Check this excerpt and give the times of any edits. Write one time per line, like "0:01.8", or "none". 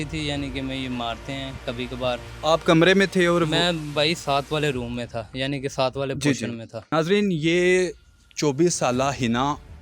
0:02.3
0:06.9